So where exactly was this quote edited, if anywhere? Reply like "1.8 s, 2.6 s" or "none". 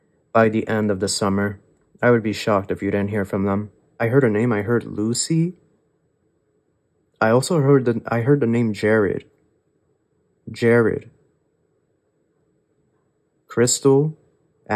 3.8 s